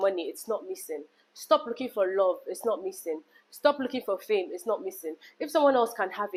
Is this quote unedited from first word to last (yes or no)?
yes